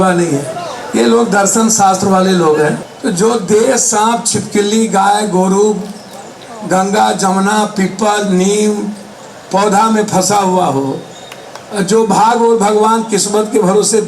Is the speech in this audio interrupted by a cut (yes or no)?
yes